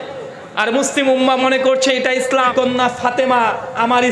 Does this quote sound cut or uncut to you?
cut